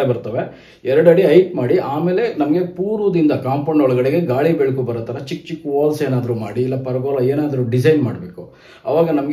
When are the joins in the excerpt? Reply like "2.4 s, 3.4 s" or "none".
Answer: none